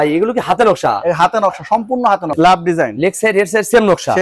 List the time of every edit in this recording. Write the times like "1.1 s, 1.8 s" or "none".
2.3 s